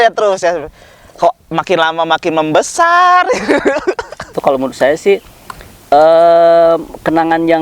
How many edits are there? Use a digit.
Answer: 1